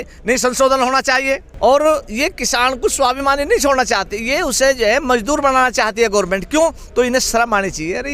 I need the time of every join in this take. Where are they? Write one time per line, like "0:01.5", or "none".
0:01.5
0:06.8

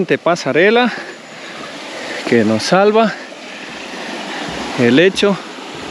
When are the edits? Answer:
none

